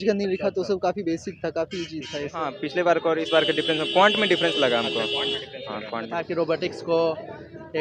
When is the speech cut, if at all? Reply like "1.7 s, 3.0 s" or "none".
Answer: 2.6 s, 6.1 s